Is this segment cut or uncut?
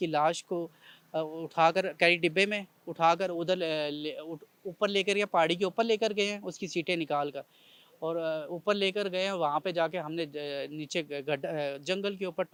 uncut